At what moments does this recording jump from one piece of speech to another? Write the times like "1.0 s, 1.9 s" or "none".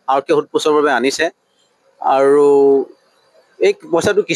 none